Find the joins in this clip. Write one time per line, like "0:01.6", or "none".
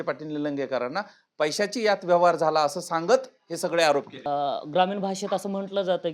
0:04.3